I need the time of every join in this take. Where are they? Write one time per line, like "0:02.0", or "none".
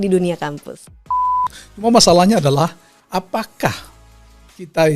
0:01.3